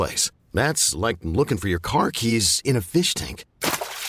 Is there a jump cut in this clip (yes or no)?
no